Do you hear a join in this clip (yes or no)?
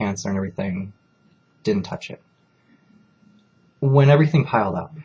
no